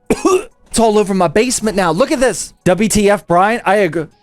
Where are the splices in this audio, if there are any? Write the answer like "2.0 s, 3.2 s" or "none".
0.7 s, 2.5 s